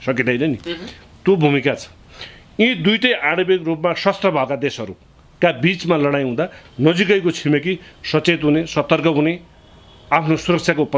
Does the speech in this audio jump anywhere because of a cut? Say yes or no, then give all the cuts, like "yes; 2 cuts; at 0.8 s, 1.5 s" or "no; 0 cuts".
no; 0 cuts